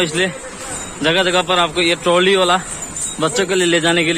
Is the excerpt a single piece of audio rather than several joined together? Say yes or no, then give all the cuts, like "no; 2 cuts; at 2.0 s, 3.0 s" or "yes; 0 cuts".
yes; 0 cuts